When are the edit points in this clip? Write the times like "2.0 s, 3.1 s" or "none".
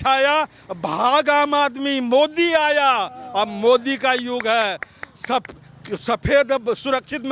none